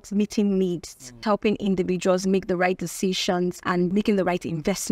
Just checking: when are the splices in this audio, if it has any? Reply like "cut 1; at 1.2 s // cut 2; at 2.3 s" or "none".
cut 1; at 1.2 s // cut 2; at 3.9 s